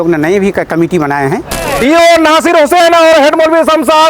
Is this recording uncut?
no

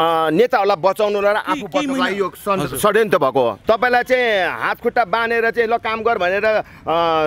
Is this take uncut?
no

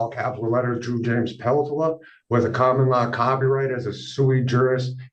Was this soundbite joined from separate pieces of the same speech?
no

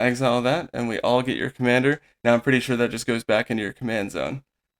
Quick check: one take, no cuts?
yes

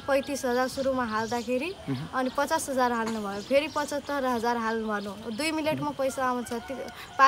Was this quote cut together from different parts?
no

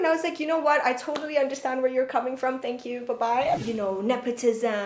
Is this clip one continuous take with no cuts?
no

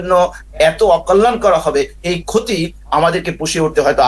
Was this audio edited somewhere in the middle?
no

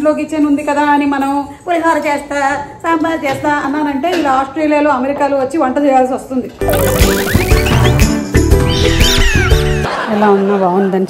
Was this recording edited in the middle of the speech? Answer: no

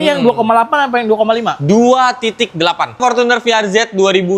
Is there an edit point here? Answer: yes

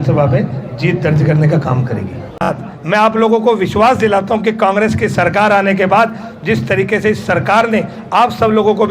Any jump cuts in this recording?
yes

